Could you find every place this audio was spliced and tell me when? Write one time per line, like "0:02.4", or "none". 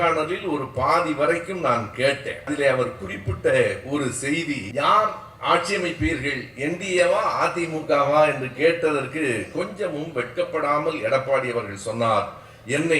0:02.5
0:04.7